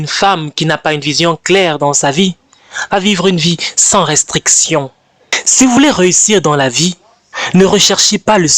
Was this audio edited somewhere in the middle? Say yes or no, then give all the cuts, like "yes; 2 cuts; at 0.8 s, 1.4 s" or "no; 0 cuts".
yes; 1 cut; at 5.0 s